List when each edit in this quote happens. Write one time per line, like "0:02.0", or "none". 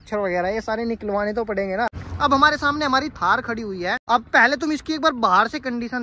0:02.0